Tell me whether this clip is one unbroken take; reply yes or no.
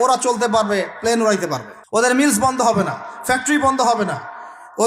no